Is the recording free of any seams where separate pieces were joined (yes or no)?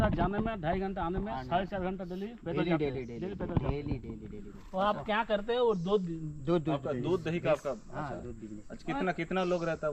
yes